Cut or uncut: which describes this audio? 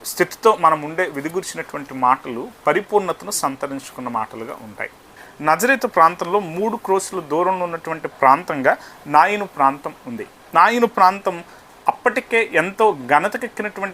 cut